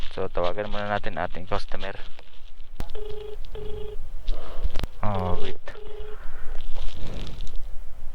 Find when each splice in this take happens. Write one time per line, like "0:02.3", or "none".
0:02.8
0:04.8